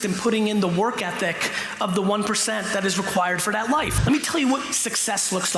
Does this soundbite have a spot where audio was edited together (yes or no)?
yes